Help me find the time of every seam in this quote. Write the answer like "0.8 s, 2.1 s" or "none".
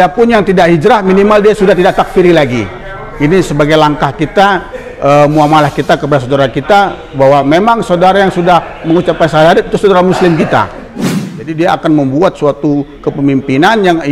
11.4 s